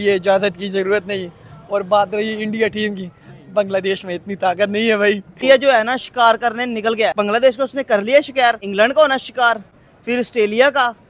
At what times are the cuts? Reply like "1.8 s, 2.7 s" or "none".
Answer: 5.3 s, 7.1 s, 8.6 s